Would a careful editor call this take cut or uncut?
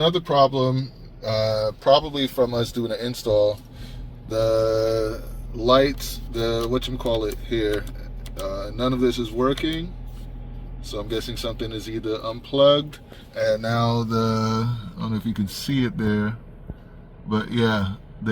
uncut